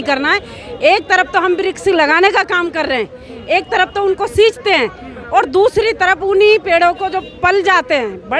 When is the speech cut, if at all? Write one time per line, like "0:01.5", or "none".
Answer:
none